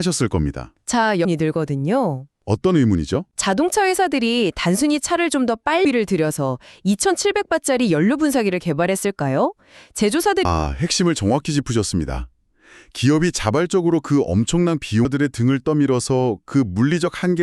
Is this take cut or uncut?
cut